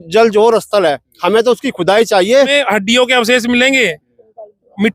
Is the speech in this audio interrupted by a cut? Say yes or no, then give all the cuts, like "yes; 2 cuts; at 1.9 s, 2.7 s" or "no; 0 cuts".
yes; 1 cut; at 2.5 s